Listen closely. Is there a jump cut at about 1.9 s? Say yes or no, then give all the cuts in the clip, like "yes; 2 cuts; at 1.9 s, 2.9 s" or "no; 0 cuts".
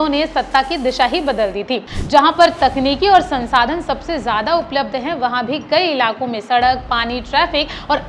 yes; 1 cut; at 1.9 s